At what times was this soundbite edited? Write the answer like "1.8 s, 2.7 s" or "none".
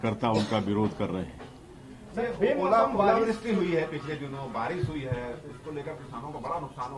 none